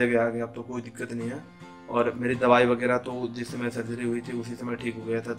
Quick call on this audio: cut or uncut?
uncut